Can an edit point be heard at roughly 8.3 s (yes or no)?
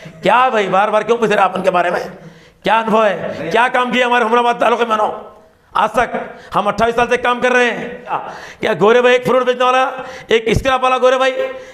yes